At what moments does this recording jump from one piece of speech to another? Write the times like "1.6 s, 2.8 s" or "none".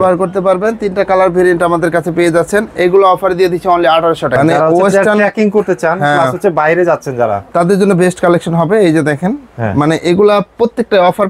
4.4 s